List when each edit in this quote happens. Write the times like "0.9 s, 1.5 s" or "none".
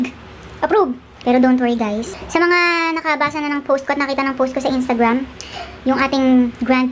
1.1 s